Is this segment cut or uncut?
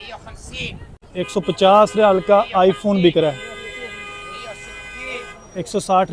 cut